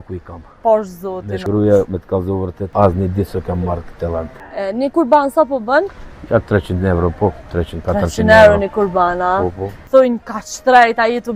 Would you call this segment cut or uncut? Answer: cut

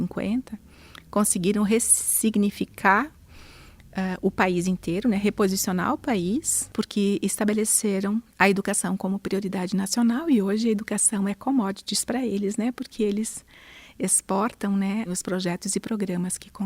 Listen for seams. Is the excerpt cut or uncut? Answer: cut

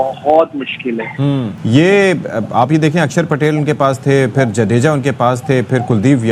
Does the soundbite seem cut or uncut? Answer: uncut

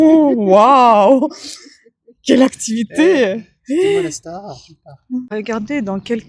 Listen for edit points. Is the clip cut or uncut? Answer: cut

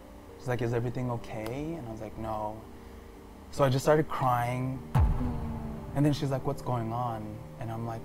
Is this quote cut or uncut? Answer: uncut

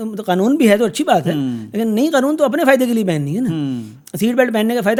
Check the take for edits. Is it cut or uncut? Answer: uncut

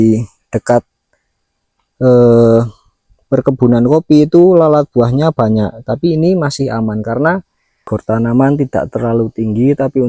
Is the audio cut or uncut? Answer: cut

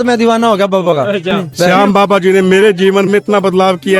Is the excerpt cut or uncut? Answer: cut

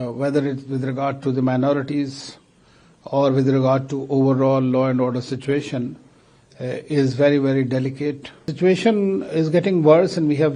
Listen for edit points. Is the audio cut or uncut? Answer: cut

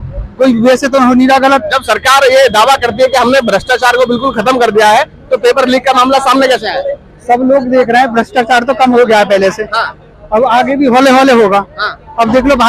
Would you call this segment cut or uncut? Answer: uncut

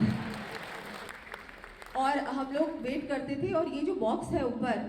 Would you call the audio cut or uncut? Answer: cut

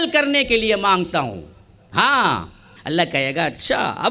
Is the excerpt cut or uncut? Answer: cut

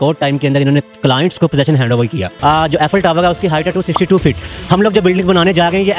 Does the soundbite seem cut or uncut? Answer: cut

